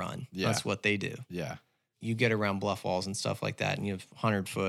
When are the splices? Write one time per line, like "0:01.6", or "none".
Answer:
0:01.9